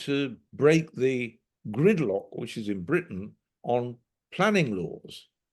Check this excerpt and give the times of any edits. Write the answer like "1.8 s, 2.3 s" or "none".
none